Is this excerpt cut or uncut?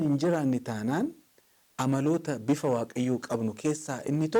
uncut